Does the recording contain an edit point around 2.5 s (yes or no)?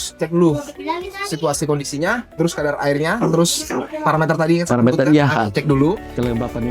no